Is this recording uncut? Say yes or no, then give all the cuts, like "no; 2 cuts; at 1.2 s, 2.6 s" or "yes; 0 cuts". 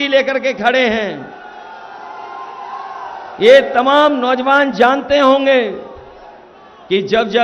yes; 0 cuts